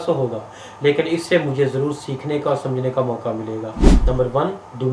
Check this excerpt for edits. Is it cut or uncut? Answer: cut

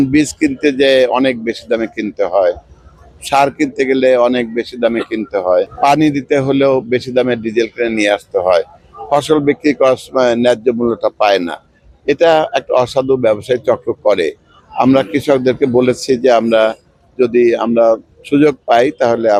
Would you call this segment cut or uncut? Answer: uncut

